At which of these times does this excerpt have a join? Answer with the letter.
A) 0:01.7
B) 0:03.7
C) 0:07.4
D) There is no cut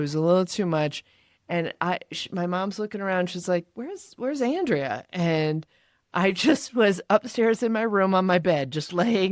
D